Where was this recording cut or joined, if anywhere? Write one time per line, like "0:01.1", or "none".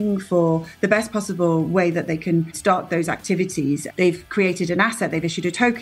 0:02.6
0:03.8